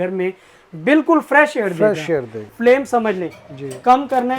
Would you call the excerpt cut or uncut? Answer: cut